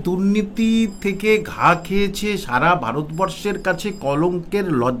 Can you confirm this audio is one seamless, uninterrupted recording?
yes; 0 cuts

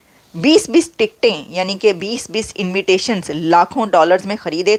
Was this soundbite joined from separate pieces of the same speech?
no; 0 cuts

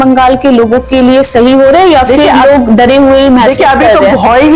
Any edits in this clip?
no; 0 cuts

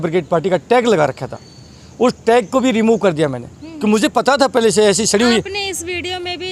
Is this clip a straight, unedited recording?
yes; 0 cuts

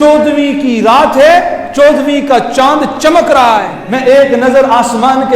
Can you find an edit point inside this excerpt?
yes; 1 cut; at 3.8 s

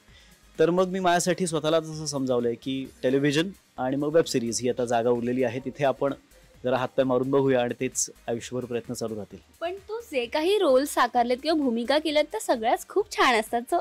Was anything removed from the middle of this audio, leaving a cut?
no; 0 cuts

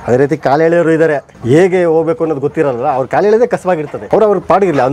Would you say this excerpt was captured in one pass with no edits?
no; 2 cuts; at 1.3 s, 3.9 s

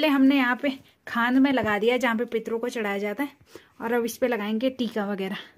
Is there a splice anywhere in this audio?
no; 0 cuts

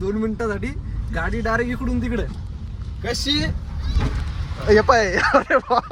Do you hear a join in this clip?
no; 0 cuts

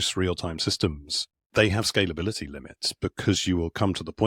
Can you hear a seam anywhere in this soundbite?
no; 0 cuts

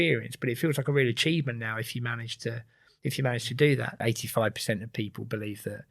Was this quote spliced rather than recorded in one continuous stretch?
yes; 1 cut; at 3.9 s

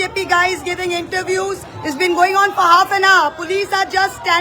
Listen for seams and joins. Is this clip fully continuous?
no; 1 cut; at 1.7 s

